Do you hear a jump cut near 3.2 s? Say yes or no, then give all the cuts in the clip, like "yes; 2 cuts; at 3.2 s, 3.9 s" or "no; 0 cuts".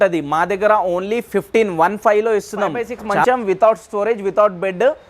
yes; 1 cut; at 3.2 s